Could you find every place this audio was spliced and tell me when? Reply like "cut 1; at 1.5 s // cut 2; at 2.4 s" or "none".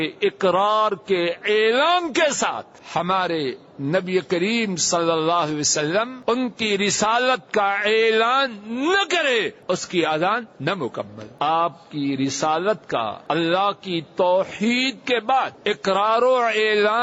cut 1; at 2.7 s // cut 2; at 6.1 s // cut 3; at 9.6 s // cut 4; at 11.2 s // cut 5; at 13.2 s // cut 6; at 15.6 s